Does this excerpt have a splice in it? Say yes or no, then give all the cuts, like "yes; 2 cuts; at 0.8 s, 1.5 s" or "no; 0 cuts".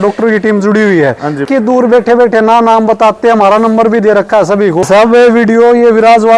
yes; 2 cuts; at 1.5 s, 4.8 s